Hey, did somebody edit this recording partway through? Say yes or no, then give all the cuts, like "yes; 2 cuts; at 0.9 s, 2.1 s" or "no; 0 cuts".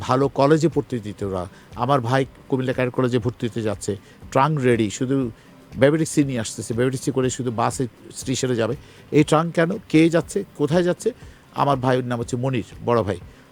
no; 0 cuts